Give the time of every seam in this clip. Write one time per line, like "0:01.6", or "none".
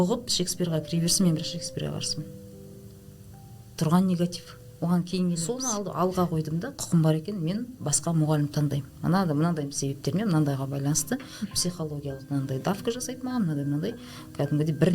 0:05.5